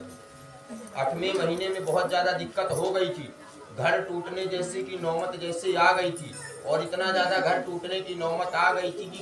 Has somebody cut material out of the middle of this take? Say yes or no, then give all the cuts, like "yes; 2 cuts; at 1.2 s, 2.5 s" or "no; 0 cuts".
no; 0 cuts